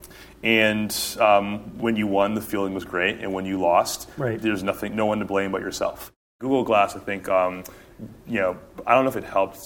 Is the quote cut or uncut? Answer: cut